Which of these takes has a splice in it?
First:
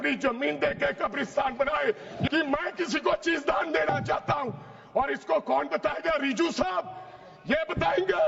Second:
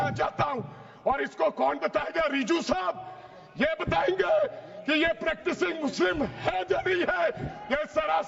first; 1 cut; at 2.3 s

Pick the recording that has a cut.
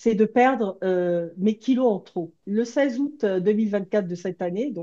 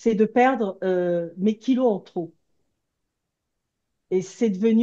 first; 1 cut; at 2.4 s

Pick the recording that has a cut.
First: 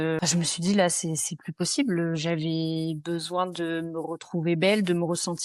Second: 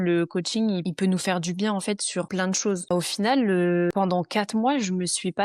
second; 3 cuts; at 0.9 s, 2.4 s, 3.9 s

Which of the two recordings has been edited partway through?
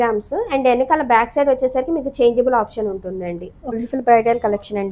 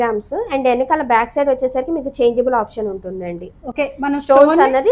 first; 1 cut; at 3.8 s

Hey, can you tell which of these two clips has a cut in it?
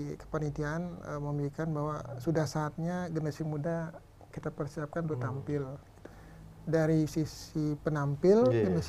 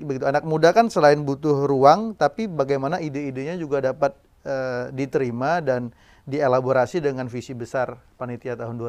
first; 1 cut; at 6.0 s

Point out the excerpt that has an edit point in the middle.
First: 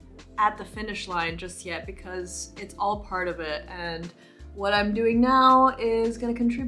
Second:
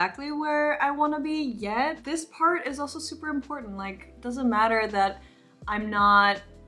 second; 1 cut; at 2.0 s

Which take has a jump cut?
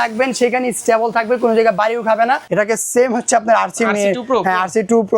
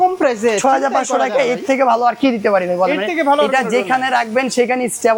first; 1 cut; at 2.4 s

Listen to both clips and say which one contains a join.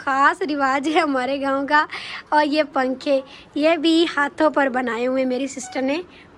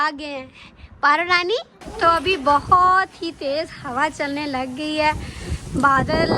second; 1 cut; at 1.8 s

